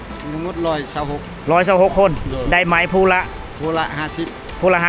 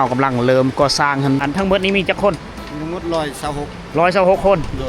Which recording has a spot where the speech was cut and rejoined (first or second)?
second